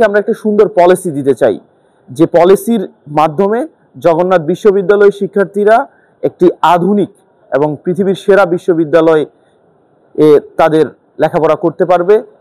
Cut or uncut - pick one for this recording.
uncut